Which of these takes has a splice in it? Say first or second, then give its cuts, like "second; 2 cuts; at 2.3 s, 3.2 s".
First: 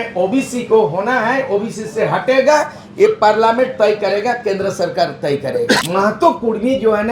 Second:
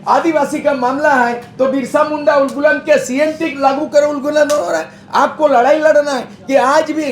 first; 1 cut; at 5.8 s